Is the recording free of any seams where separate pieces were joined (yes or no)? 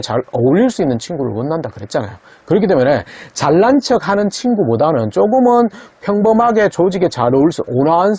yes